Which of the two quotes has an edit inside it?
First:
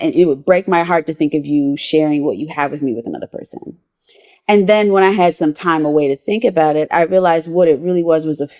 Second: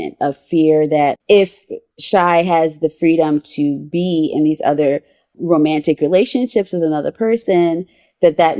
second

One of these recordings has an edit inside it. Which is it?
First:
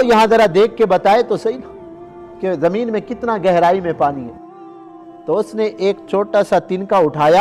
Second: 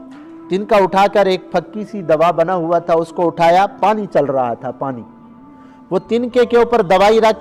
first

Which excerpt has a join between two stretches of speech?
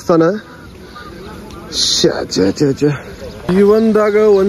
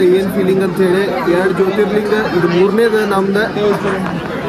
first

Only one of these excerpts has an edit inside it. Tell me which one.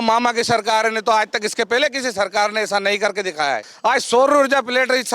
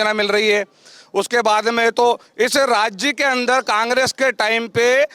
first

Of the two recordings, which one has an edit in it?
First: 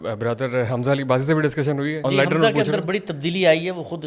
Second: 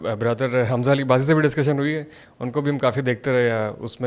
first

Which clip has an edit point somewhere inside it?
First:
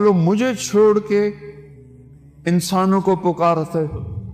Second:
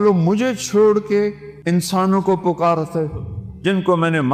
second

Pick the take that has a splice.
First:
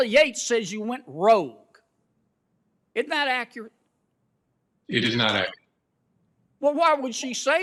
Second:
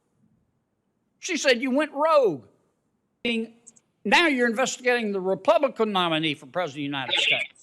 second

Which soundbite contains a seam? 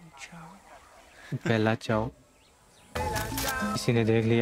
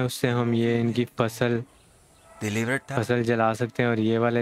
first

